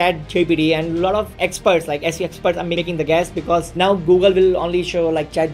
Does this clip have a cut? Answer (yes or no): yes